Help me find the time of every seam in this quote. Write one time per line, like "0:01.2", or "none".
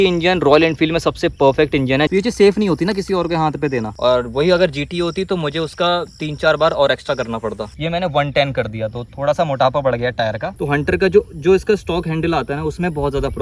0:02.1
0:03.9
0:07.7
0:10.5